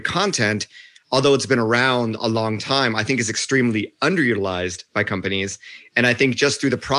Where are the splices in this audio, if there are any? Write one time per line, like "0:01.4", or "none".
none